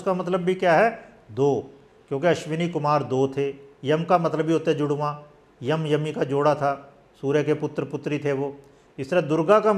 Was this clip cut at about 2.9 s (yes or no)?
no